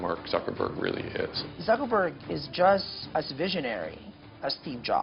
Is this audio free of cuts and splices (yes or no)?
no